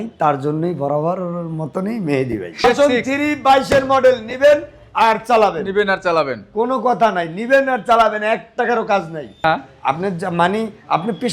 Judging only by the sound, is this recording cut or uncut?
cut